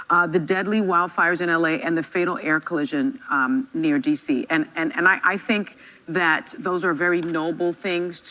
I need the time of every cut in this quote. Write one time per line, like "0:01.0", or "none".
none